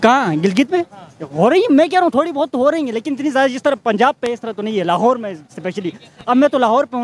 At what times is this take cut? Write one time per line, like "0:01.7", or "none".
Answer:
none